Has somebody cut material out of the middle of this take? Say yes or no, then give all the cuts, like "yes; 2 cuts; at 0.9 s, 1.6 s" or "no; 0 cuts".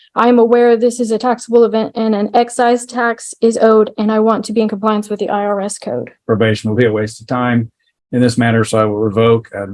yes; 1 cut; at 6.1 s